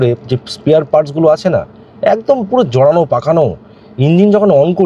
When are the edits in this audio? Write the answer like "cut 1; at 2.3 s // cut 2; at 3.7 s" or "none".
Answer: none